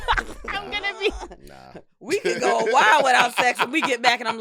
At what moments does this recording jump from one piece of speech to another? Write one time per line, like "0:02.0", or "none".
none